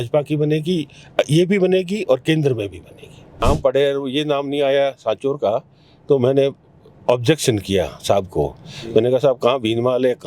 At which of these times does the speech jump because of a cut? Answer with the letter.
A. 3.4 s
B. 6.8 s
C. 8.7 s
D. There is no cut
A